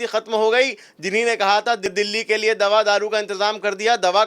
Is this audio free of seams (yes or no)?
yes